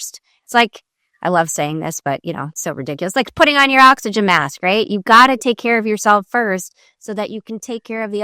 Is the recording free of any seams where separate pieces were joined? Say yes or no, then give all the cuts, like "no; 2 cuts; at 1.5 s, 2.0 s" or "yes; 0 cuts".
yes; 0 cuts